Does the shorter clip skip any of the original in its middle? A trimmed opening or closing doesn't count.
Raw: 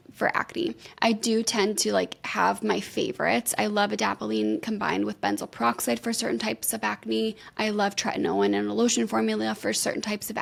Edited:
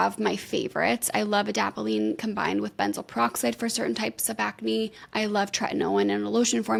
no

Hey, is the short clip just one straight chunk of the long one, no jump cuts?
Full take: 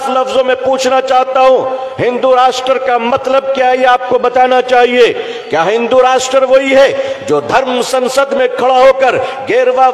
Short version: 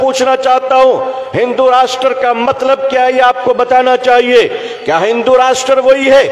yes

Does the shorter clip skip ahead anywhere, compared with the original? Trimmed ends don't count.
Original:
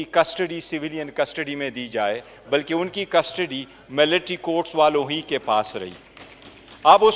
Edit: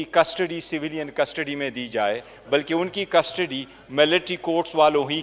no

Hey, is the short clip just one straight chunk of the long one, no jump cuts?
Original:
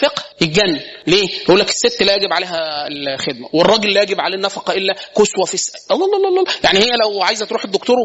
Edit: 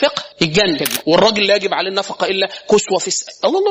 no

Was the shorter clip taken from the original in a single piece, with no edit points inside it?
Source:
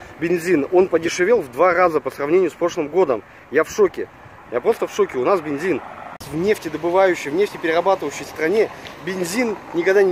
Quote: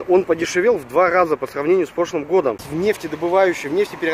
no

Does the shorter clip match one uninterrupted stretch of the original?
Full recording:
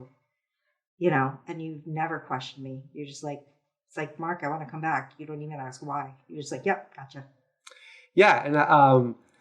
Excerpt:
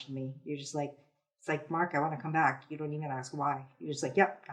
yes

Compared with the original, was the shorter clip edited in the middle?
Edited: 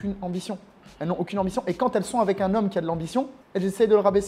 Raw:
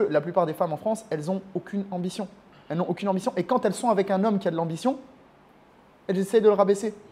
yes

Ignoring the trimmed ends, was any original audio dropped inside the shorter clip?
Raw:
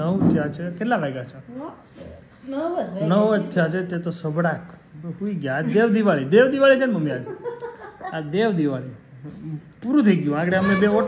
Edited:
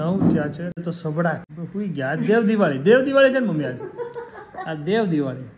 yes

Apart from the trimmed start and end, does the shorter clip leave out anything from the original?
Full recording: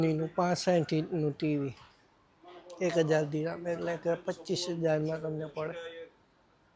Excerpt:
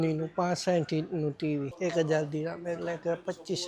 yes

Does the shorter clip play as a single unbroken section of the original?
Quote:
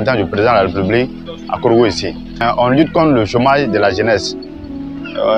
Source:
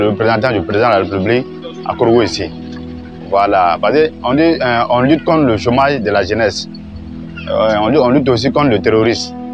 no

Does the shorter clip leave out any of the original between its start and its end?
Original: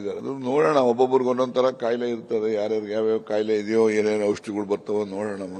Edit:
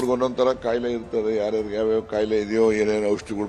no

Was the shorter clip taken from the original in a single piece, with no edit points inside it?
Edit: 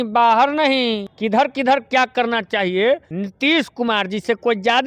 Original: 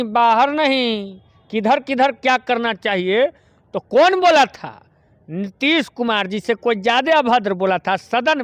no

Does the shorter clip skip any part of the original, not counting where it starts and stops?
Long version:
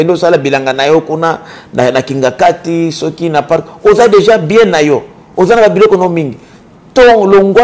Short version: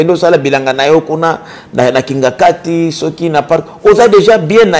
no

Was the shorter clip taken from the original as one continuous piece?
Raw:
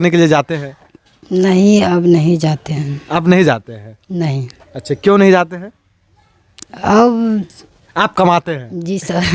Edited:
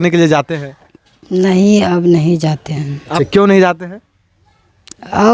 no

